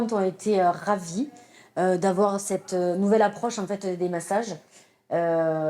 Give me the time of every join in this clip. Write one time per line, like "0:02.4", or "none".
none

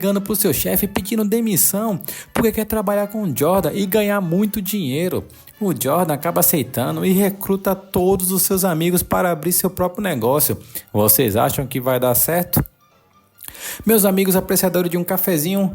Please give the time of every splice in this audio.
none

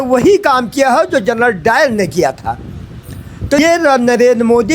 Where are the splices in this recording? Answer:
0:03.6

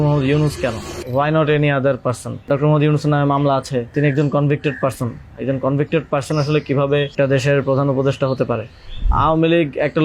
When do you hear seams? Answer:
0:00.9
0:02.5
0:03.9
0:07.1
0:09.1

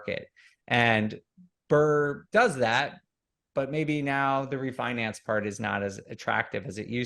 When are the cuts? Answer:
0:02.2

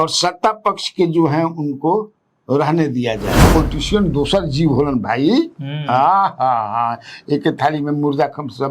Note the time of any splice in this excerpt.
0:03.5

